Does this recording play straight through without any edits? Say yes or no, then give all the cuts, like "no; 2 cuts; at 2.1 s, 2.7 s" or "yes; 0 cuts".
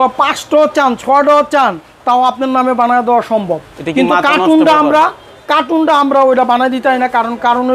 yes; 0 cuts